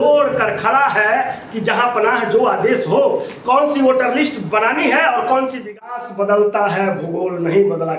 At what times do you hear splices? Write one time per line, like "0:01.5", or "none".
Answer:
0:05.8